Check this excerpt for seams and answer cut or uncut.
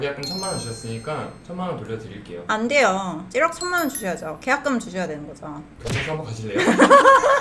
uncut